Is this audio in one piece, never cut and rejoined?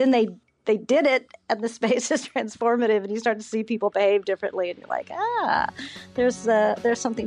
yes; 0 cuts

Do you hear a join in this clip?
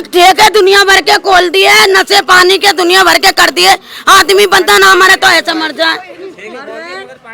no; 0 cuts

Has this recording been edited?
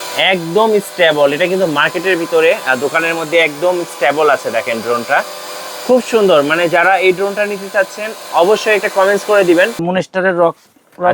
yes; 1 cut; at 9.8 s

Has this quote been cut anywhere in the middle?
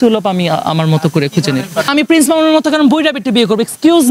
yes; 1 cut; at 1.9 s

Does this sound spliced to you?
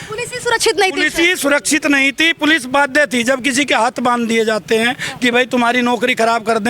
no; 0 cuts

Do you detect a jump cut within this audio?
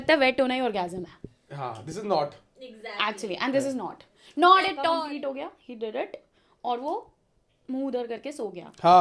yes; 1 cut; at 5.0 s

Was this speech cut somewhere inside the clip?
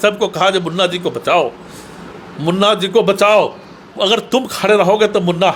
no; 0 cuts

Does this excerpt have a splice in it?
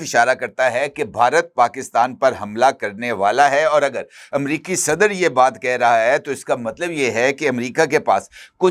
no; 0 cuts

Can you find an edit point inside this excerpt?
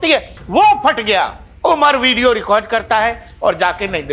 yes; 1 cut; at 1.4 s

